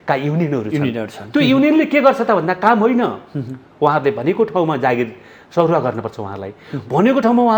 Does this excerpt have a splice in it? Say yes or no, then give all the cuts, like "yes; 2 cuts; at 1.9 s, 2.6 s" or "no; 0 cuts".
no; 0 cuts